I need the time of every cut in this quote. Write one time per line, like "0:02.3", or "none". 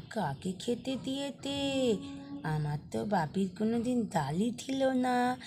none